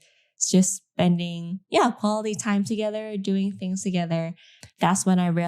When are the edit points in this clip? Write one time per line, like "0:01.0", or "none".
0:04.6